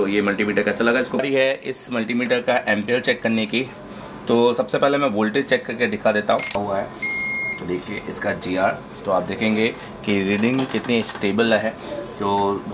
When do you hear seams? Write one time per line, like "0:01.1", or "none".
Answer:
0:01.2
0:06.6